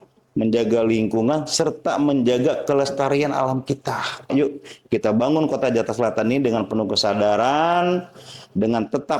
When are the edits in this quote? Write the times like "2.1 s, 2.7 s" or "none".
4.3 s